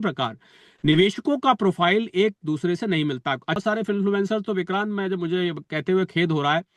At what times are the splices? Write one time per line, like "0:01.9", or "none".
0:03.6